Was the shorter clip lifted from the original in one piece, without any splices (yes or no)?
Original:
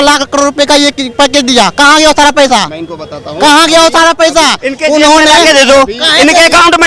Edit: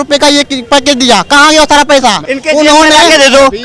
no